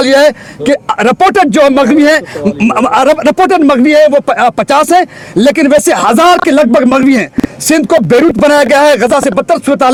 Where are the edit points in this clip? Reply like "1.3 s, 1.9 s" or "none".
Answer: none